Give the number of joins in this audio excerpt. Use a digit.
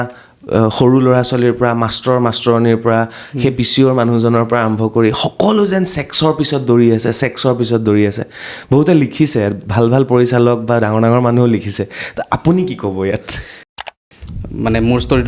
1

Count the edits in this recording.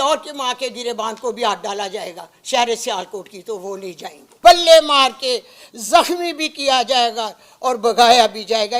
1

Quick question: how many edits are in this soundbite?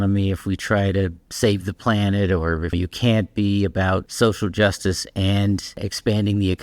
3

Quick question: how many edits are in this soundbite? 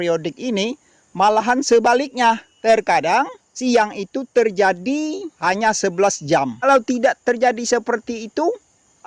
4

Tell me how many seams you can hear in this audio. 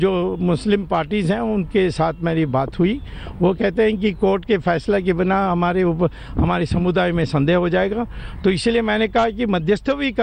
0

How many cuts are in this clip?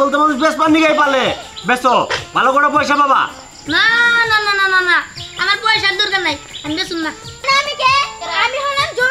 1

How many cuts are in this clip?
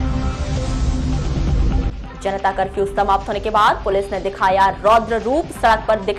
1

